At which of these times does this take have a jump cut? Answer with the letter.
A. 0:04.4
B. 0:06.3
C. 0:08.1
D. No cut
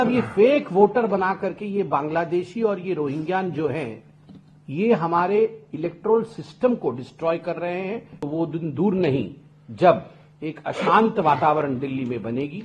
C